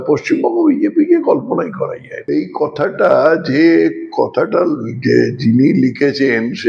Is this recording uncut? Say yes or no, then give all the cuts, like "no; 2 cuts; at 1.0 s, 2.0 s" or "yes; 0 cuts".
no; 1 cut; at 2.1 s